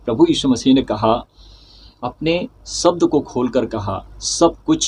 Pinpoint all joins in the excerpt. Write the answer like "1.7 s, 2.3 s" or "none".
none